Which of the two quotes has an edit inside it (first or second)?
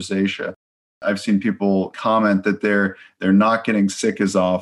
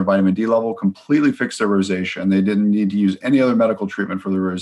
first